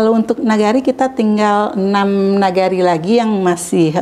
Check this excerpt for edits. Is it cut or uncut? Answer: uncut